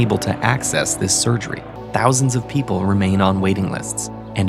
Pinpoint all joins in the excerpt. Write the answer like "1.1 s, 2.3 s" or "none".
1.7 s